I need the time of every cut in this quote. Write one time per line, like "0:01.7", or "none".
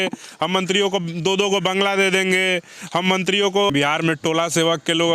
0:03.7